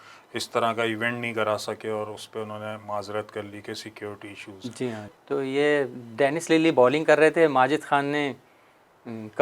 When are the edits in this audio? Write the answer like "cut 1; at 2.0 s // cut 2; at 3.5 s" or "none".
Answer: cut 1; at 5.1 s